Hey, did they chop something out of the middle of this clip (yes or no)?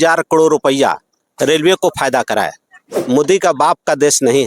yes